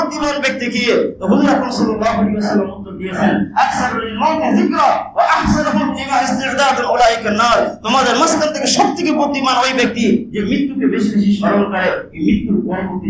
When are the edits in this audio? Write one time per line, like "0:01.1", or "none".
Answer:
none